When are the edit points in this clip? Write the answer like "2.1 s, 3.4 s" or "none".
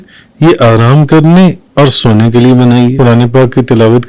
3.0 s